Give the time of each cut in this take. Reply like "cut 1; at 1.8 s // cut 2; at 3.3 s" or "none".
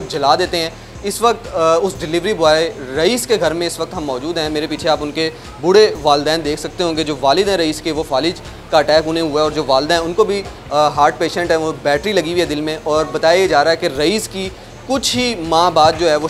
none